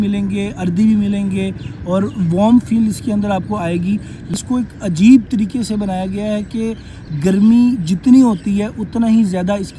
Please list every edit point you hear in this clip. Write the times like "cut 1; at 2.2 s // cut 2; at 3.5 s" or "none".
cut 1; at 4.3 s